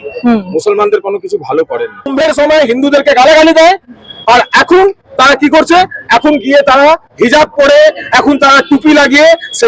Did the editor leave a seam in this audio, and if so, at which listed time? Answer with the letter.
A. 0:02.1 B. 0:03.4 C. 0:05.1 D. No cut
A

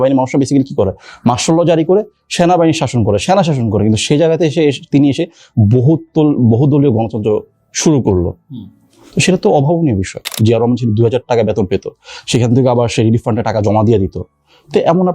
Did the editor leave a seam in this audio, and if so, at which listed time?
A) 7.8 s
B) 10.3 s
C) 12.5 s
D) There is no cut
B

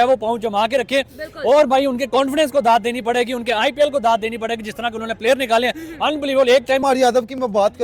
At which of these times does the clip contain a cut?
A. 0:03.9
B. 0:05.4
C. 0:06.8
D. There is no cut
C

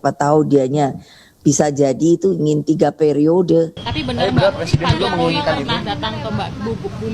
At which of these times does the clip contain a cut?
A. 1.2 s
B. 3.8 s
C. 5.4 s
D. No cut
B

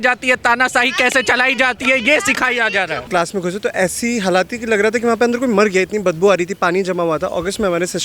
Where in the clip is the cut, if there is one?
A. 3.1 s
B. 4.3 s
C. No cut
A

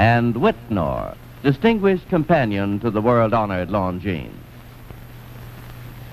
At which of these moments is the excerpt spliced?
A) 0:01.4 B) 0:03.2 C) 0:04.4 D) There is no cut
C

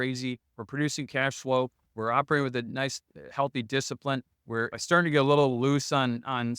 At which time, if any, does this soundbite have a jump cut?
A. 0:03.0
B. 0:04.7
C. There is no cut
B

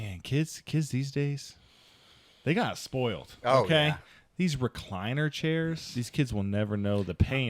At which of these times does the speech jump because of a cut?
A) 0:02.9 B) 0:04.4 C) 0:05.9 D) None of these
C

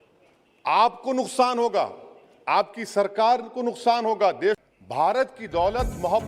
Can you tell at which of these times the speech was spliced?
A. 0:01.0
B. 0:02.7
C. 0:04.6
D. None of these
C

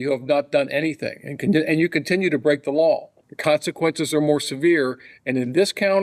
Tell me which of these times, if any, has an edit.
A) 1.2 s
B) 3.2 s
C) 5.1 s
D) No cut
B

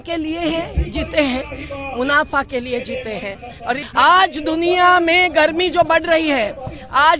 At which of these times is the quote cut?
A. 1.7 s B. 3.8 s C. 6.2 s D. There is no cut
B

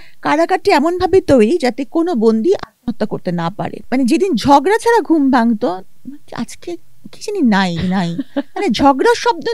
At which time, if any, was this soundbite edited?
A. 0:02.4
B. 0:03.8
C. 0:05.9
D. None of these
B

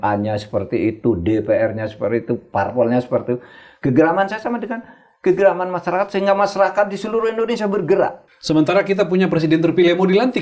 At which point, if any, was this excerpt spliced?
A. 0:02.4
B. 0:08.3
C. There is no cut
B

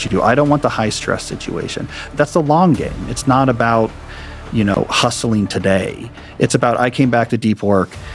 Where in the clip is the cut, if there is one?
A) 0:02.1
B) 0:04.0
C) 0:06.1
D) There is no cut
A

